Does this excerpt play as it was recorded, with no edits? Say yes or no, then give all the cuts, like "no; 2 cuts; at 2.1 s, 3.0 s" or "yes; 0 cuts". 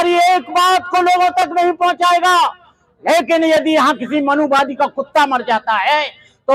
yes; 0 cuts